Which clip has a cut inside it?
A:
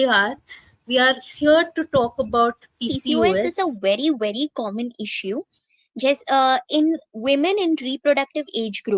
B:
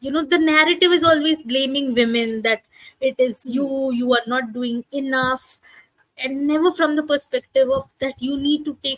A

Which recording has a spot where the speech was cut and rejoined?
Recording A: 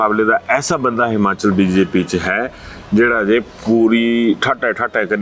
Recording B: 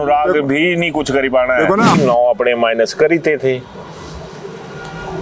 B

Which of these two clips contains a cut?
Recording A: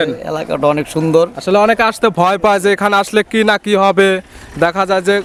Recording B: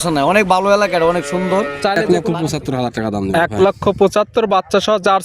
B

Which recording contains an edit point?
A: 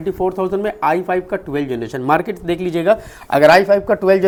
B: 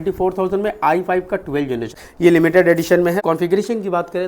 B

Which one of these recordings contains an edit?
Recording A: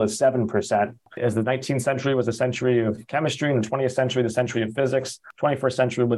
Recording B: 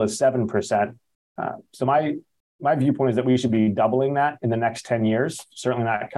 A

